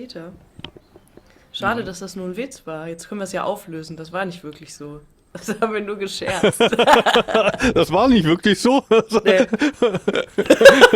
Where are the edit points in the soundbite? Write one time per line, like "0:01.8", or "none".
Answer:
none